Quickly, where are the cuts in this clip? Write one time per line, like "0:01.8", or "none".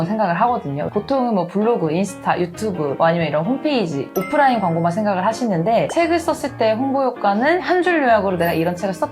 0:00.9
0:05.9